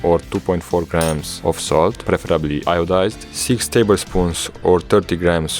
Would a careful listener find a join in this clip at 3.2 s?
yes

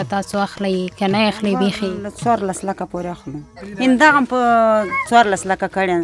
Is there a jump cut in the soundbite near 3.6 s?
yes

